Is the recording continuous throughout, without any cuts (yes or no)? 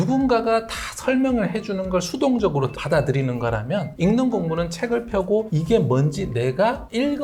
yes